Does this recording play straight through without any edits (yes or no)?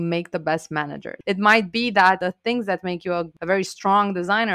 no